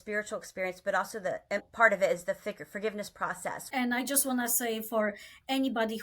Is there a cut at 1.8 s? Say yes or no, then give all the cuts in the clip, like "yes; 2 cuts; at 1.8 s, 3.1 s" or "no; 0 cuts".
no; 1 cut; at 3.7 s